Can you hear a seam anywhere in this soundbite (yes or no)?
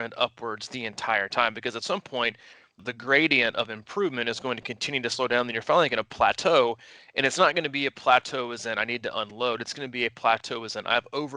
yes